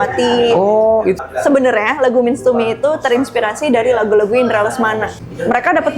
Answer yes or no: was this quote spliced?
yes